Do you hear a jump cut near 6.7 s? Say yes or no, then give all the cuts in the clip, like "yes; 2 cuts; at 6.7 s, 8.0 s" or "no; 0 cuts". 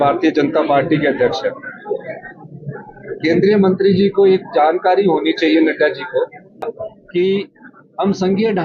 yes; 1 cut; at 6.7 s